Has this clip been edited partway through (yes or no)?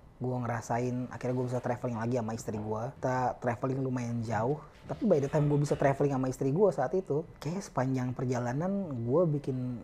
yes